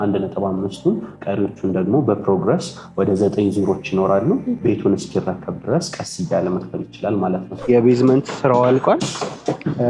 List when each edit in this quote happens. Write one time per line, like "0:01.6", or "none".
0:04.6
0:07.7